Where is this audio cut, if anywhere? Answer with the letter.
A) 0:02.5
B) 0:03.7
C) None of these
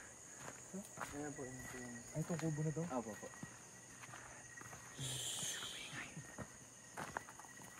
C